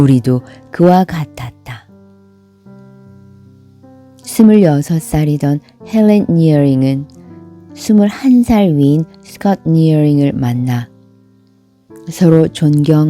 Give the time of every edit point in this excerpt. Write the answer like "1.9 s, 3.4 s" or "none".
1.9 s, 4.3 s